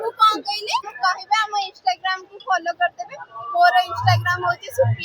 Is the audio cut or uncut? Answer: cut